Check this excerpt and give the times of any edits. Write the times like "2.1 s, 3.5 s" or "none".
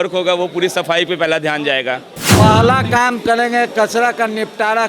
2.2 s